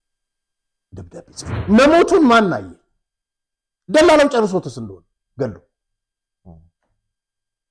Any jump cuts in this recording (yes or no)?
yes